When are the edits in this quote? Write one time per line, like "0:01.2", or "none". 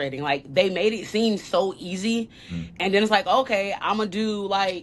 none